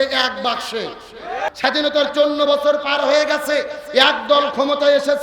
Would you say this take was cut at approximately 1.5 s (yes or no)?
yes